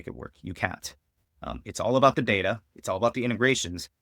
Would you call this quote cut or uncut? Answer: uncut